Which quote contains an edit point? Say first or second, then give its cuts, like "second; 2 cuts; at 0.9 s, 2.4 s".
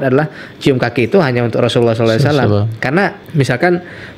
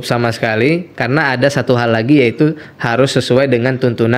first; 1 cut; at 3.2 s